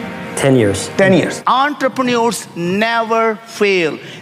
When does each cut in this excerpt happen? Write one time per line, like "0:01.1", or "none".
0:01.4